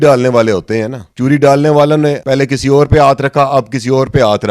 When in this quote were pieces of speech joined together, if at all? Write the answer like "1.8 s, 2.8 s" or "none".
1.0 s, 2.2 s